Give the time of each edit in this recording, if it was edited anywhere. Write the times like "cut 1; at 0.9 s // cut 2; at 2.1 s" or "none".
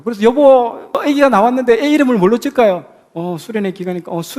cut 1; at 1.0 s

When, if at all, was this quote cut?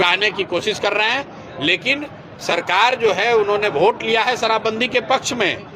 none

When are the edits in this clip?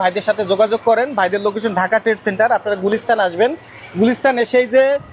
none

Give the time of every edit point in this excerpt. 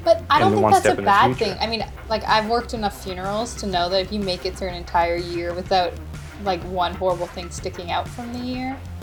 none

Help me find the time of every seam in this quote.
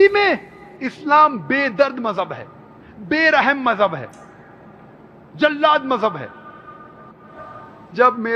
none

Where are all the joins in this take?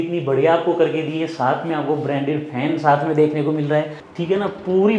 cut 1; at 4.0 s

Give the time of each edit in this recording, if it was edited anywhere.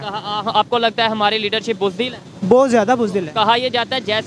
cut 1; at 2.3 s

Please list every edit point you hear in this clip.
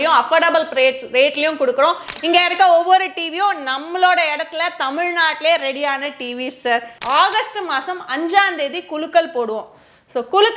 cut 1; at 6.9 s

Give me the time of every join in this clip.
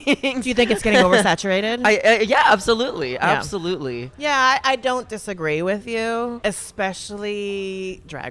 cut 1; at 6.4 s

